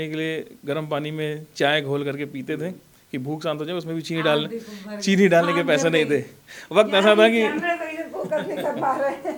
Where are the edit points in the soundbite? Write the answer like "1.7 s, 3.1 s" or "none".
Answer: none